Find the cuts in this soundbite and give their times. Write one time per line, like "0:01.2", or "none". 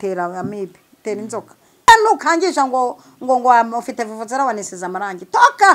0:01.9